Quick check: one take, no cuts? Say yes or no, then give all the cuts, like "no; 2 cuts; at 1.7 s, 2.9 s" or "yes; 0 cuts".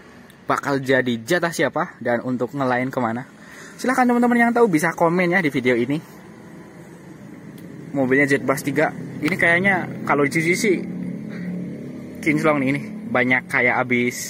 yes; 0 cuts